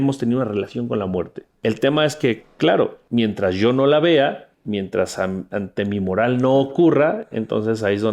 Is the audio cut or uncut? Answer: cut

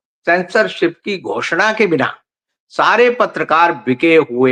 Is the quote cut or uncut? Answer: uncut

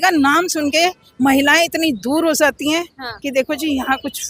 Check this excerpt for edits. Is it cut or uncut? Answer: uncut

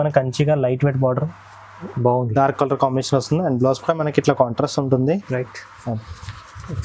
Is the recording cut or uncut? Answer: uncut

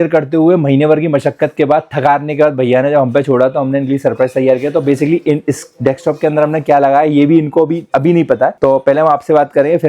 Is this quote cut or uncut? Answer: uncut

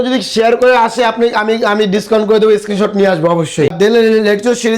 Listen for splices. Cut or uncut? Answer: cut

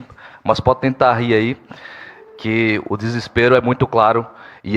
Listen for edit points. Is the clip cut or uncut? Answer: uncut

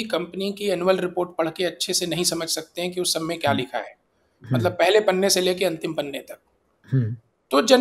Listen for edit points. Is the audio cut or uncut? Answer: uncut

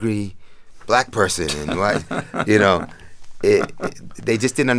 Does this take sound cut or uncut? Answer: uncut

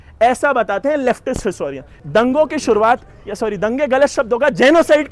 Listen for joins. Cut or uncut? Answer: cut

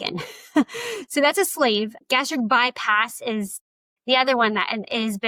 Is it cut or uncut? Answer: uncut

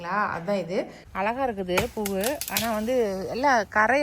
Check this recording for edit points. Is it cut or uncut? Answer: cut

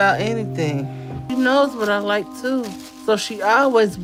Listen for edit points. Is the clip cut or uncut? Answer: uncut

